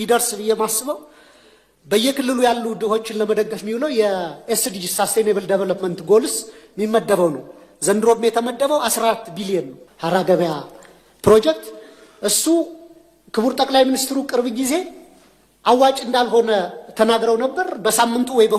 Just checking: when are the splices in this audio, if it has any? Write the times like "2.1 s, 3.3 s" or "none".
9.8 s